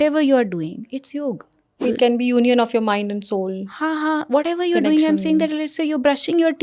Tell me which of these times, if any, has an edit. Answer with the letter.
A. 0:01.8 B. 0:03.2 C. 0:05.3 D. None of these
A